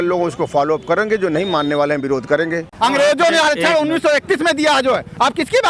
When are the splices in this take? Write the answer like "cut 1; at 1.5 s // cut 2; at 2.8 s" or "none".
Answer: cut 1; at 2.7 s